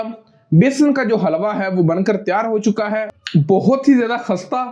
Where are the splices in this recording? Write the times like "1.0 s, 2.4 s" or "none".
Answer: 3.1 s